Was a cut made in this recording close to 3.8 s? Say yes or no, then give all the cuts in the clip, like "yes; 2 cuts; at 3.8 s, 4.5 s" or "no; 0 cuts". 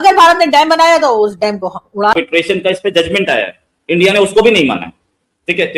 no; 1 cut; at 2.1 s